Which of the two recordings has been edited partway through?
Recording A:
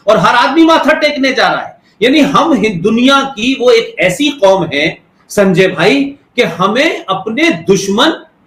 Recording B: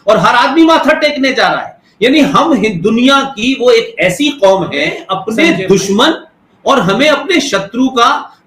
B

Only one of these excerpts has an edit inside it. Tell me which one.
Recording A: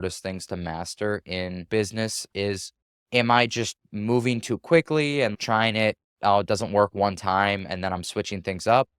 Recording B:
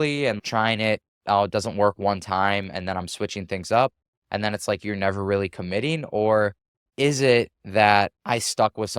A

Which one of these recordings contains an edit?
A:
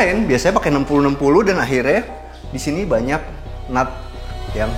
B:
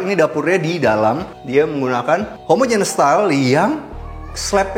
B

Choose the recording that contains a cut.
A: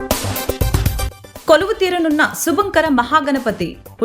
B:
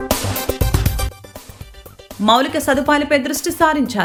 A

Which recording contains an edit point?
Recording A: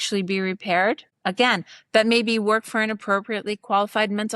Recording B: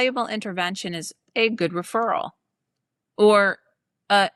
A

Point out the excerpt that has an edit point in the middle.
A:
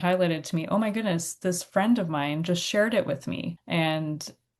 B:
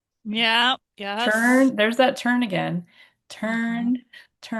A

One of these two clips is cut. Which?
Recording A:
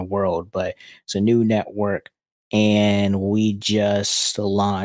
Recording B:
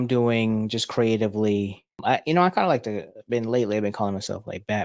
B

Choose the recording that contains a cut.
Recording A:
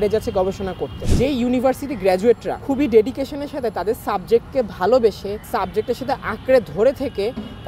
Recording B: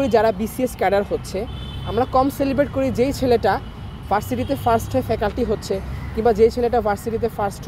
A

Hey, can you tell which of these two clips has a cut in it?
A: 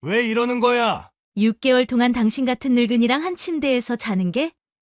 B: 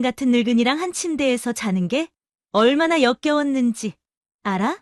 A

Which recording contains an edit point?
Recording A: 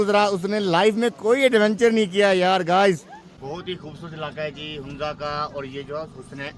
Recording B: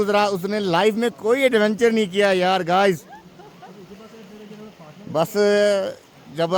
A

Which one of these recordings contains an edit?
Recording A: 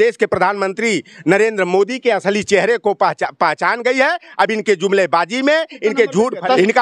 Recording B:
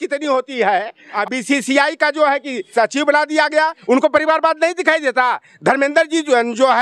B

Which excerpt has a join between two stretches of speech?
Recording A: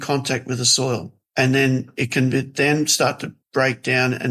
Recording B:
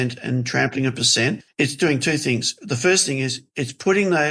B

